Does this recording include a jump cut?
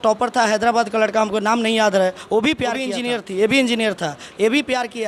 yes; 1 cut; at 2.9 s

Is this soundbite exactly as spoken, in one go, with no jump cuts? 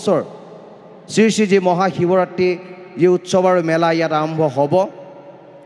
yes; 0 cuts

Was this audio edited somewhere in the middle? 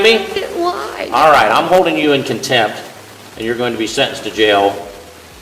no; 0 cuts

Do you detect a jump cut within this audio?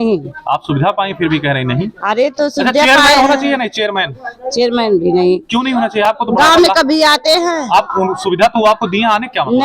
no; 0 cuts

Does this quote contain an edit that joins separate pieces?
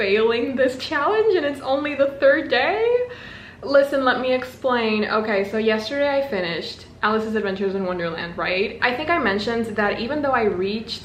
no; 0 cuts

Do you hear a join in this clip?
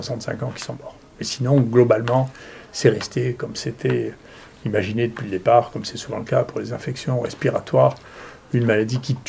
no; 0 cuts

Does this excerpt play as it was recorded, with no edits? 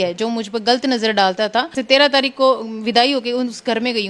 no; 1 cut; at 1.7 s

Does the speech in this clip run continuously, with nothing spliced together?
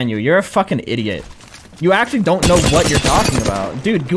yes; 0 cuts

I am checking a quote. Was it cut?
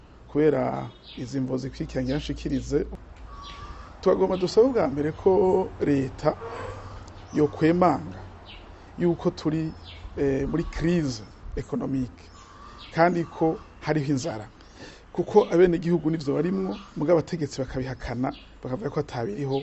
yes; 1 cut; at 2.9 s

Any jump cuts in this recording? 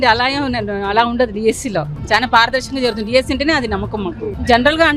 no; 0 cuts

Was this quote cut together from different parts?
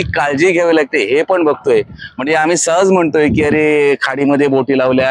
no; 0 cuts

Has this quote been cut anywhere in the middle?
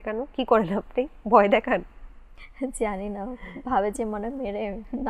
no; 0 cuts

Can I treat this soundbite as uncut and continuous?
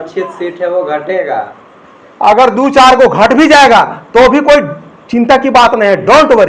yes; 0 cuts

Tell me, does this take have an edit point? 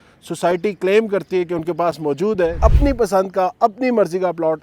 yes; 1 cut; at 2.6 s

